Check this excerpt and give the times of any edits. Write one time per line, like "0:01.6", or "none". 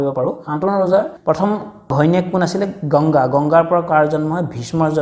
none